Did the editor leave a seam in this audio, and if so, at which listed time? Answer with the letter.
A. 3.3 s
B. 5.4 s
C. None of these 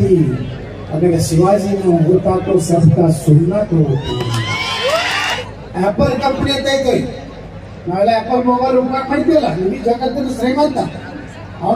B